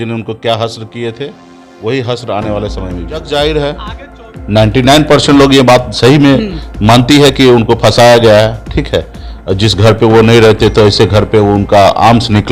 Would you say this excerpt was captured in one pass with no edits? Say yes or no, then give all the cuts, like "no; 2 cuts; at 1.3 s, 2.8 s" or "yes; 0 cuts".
no; 1 cut; at 3.3 s